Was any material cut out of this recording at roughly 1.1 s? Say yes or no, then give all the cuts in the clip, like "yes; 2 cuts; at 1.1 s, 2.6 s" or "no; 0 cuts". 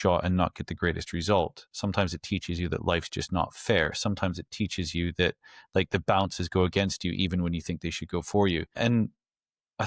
no; 1 cut; at 8.8 s